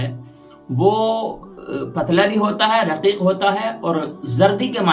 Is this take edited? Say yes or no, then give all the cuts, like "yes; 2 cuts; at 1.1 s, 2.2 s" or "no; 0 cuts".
no; 0 cuts